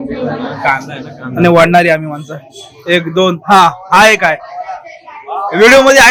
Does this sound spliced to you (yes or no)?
no